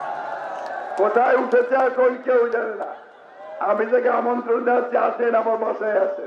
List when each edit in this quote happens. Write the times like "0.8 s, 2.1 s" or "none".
none